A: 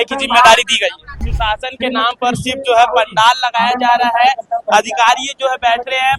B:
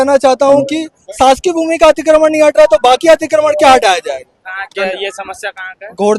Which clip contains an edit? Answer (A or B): A